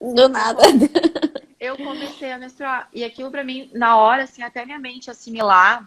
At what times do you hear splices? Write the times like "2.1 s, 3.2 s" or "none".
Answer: none